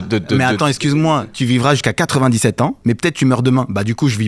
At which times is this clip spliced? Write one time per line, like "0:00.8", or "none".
0:01.2
0:02.8

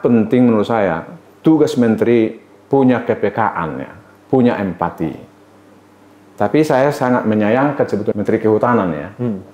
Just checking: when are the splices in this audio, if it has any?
0:08.1

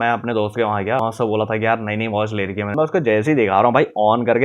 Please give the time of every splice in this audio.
0:01.0
0:02.7

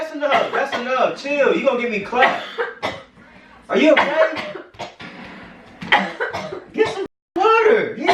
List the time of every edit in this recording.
none

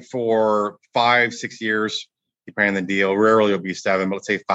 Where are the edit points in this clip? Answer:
none

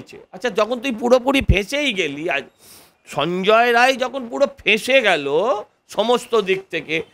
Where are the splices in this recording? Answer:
none

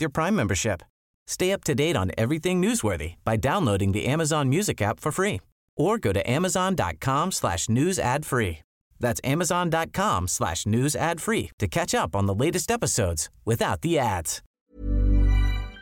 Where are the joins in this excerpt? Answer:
0:14.4

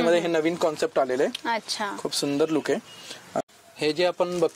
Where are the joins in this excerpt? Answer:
0:03.4

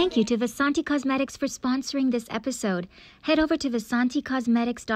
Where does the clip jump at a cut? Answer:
none

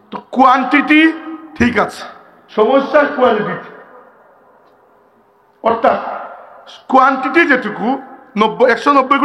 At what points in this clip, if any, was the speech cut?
none

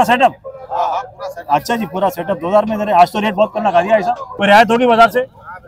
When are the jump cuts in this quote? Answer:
0:04.3

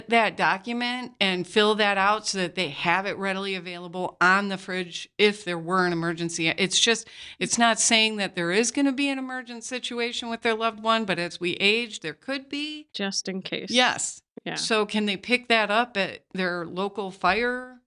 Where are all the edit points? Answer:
none

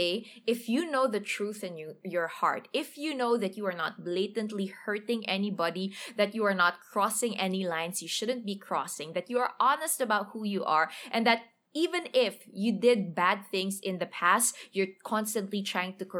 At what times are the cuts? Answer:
none

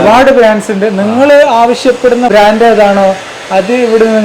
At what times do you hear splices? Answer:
0:02.3

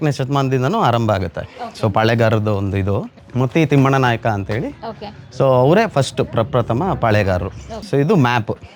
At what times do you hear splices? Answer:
0:03.2
0:07.7

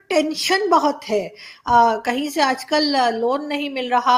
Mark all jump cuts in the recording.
none

